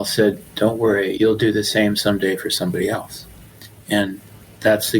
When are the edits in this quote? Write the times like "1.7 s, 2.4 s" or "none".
1.1 s